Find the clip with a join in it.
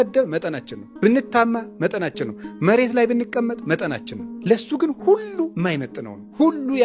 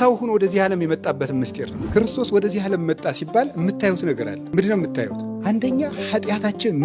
second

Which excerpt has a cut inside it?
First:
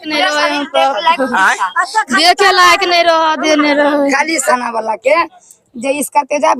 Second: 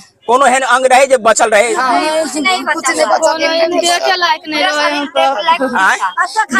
first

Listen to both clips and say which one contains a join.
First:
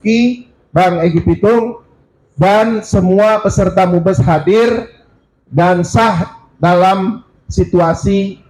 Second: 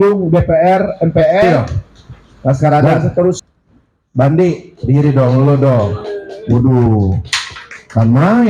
second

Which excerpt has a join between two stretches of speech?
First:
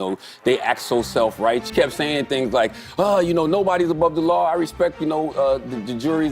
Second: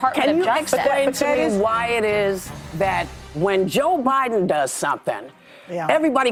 first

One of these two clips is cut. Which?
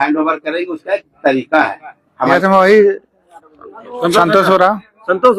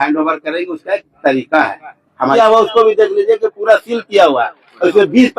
second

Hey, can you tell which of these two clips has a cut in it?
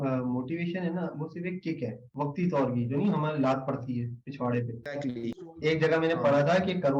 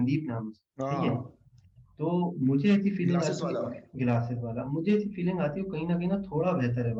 first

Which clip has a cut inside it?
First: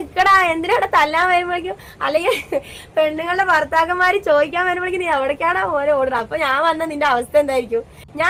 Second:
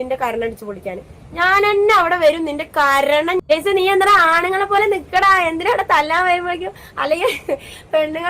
second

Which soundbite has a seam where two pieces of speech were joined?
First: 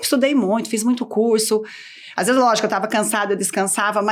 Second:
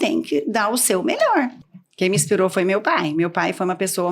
second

